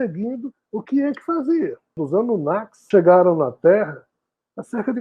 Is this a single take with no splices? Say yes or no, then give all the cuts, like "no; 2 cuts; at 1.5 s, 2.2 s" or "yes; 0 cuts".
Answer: no; 1 cut; at 2.0 s